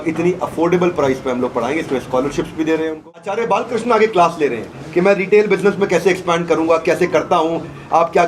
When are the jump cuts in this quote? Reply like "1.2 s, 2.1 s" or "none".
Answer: 3.4 s